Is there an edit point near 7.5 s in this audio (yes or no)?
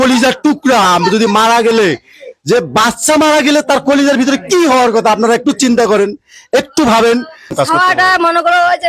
yes